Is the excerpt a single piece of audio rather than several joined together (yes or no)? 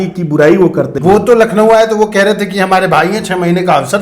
no